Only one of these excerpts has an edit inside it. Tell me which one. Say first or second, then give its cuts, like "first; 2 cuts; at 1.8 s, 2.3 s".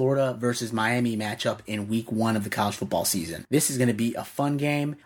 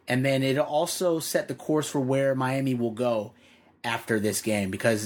first; 1 cut; at 3.4 s